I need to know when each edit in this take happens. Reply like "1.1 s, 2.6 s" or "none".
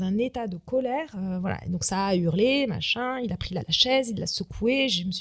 3.6 s

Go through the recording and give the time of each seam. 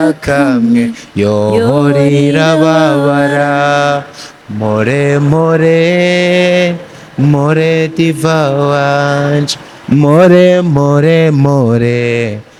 none

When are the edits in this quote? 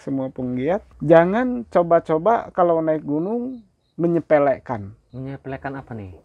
0.9 s, 5.0 s

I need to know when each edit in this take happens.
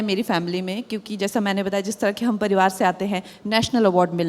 none

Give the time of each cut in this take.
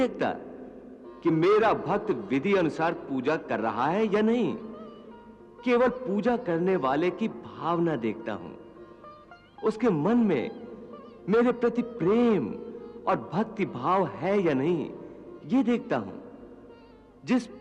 none

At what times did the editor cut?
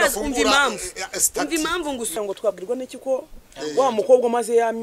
2.2 s

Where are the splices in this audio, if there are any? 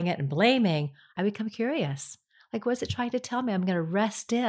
1.1 s

